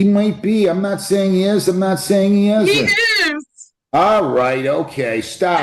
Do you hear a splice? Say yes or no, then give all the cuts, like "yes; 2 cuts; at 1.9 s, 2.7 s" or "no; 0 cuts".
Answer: no; 0 cuts